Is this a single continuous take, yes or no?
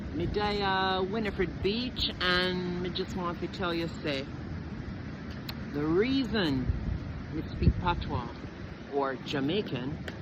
yes